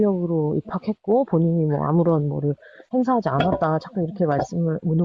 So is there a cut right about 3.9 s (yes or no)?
yes